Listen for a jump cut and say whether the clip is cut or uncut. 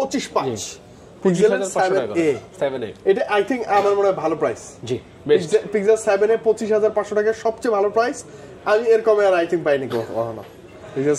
uncut